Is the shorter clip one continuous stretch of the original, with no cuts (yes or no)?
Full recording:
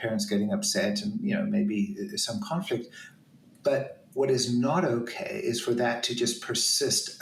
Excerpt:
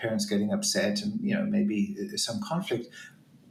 yes